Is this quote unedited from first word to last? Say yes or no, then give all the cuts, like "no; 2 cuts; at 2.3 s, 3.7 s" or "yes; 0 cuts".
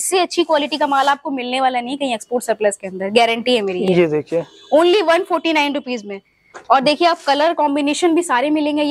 yes; 0 cuts